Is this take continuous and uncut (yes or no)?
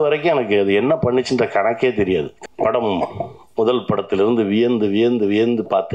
no